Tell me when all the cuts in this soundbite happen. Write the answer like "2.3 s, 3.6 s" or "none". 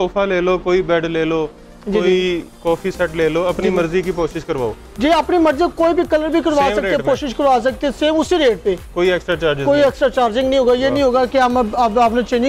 none